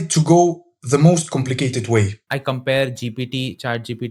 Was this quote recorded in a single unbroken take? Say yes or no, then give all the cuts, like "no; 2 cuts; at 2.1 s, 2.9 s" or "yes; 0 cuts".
no; 1 cut; at 2.2 s